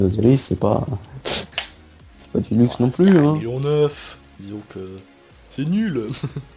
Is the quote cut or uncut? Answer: cut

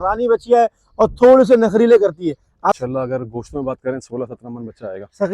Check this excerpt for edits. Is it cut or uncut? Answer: cut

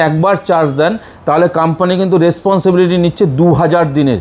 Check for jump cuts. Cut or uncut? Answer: uncut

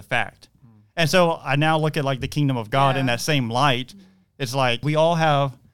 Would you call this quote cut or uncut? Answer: cut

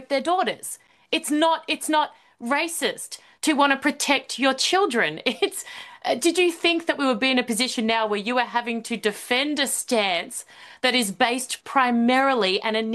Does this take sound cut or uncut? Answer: uncut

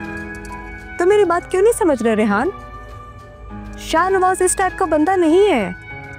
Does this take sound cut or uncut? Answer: uncut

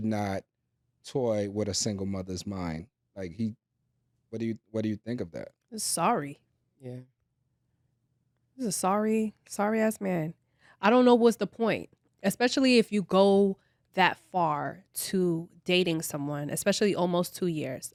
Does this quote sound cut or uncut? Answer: uncut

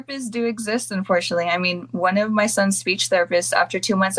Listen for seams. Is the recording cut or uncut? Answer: uncut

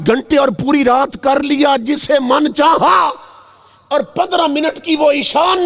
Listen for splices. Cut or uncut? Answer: uncut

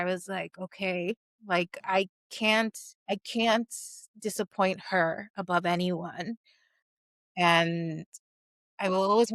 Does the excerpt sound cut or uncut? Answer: cut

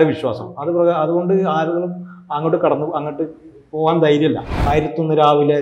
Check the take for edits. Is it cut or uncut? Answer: cut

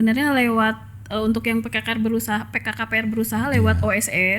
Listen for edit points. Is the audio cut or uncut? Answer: uncut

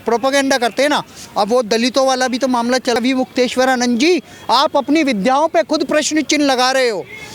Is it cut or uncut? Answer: cut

